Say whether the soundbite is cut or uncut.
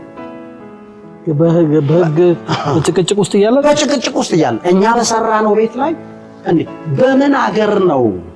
uncut